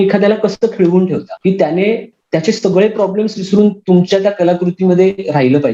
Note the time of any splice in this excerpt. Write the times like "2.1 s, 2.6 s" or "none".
1.3 s, 2.1 s